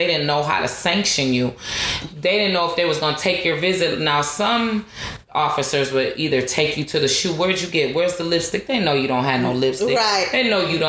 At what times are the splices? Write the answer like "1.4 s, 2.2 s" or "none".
none